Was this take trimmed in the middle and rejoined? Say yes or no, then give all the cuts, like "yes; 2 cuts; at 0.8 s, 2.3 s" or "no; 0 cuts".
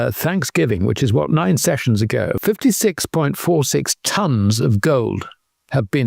yes; 1 cut; at 2.4 s